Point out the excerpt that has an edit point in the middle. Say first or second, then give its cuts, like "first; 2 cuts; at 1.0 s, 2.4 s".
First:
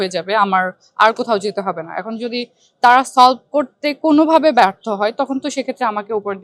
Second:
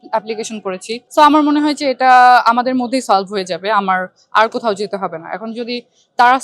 second; 1 cut; at 1.0 s